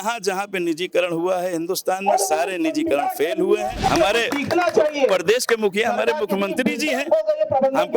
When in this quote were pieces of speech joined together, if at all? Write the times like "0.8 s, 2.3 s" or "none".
3.9 s